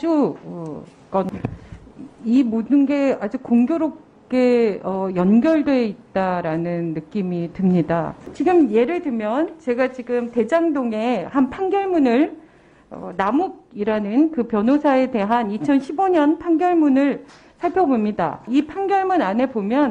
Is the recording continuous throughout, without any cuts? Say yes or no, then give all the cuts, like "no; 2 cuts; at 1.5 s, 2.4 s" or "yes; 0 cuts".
no; 3 cuts; at 1.3 s, 8.2 s, 18.5 s